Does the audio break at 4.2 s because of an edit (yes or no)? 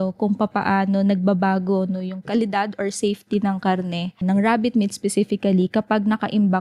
yes